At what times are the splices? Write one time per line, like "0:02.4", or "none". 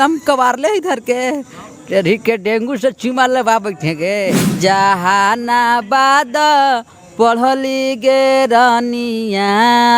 0:04.5